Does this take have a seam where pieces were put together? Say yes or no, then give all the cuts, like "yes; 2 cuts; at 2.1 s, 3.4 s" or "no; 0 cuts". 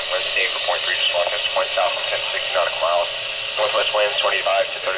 no; 0 cuts